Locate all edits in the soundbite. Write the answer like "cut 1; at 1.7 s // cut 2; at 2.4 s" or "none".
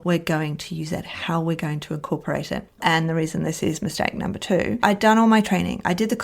cut 1; at 2.8 s // cut 2; at 4.8 s